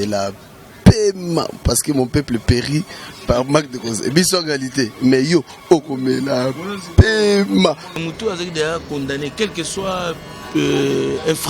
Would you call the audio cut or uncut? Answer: cut